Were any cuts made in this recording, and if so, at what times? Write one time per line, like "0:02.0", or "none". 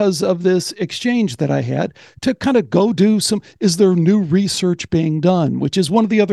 none